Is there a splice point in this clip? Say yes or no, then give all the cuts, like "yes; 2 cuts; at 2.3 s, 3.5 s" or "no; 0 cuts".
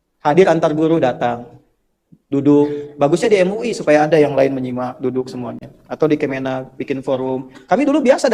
no; 0 cuts